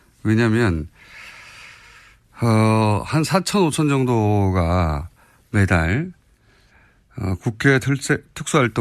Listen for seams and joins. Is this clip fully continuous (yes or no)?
yes